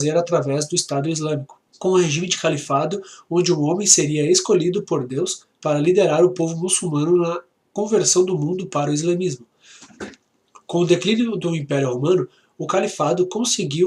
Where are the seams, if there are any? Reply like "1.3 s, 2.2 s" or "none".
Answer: 3.5 s